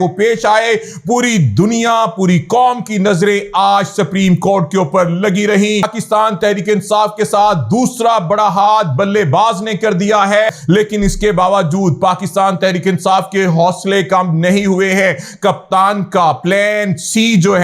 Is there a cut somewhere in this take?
yes; 2 cuts; at 5.9 s, 10.5 s

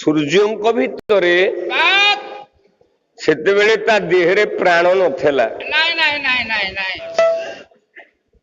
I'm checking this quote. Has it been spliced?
no; 0 cuts

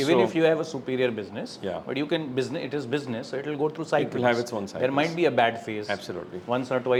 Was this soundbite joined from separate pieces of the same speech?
no; 0 cuts

